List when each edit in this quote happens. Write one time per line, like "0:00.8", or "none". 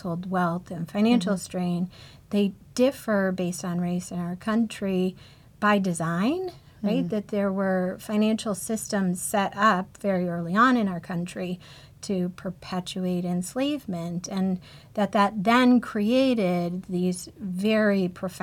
none

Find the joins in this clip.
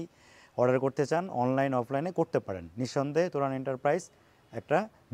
none

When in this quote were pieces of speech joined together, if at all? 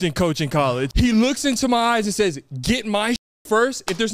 0:00.9

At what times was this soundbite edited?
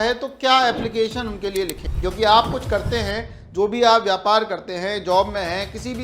0:01.8

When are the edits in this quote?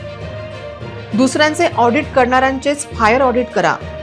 0:01.1

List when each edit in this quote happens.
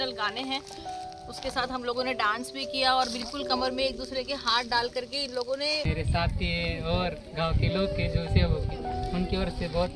0:05.8

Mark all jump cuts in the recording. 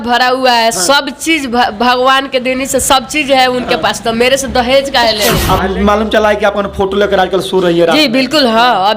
0:05.4

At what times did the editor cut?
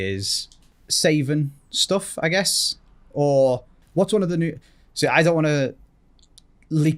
0:03.8

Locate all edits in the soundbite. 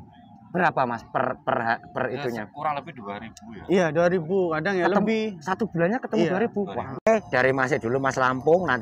0:07.1

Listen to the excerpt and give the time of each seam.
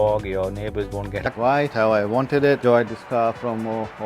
0:01.3

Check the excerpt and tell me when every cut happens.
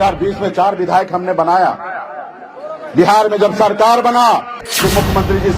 0:04.7

